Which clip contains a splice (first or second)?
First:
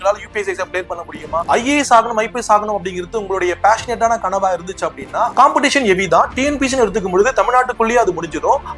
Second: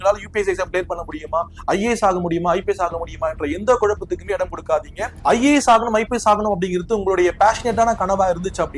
first